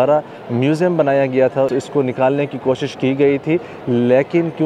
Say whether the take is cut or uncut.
cut